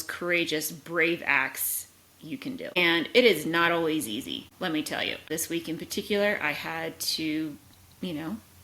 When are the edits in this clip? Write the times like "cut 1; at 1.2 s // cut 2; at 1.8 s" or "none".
cut 1; at 2.8 s // cut 2; at 4.4 s // cut 3; at 5.3 s